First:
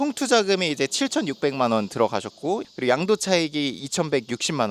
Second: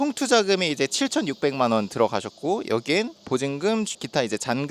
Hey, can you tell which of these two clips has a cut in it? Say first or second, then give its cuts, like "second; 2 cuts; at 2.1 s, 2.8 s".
first; 1 cut; at 2.6 s